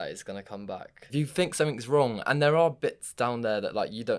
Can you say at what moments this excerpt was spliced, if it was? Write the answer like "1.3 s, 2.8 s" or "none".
1.0 s